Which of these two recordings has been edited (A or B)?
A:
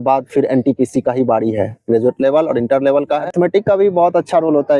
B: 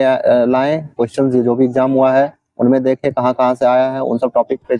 A